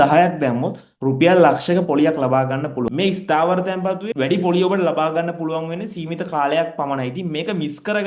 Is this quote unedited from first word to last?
no; 2 cuts; at 2.9 s, 4.1 s

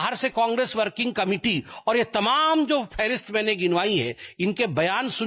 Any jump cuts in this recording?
no; 0 cuts

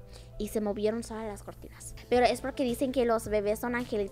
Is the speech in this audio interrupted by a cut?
yes; 1 cut; at 1.9 s

